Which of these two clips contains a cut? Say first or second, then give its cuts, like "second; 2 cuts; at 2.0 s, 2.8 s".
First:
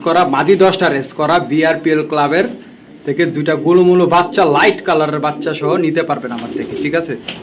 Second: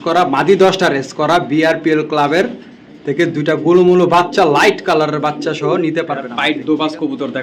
second; 1 cut; at 6.3 s